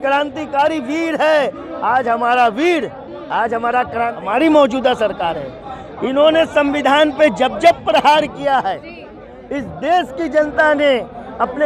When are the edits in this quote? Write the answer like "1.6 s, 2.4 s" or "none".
4.2 s